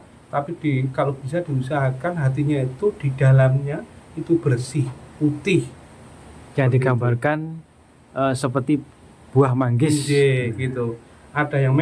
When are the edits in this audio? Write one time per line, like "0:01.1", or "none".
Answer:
none